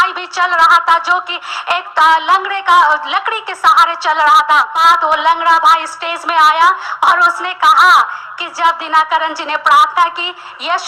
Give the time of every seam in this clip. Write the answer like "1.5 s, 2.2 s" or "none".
4.7 s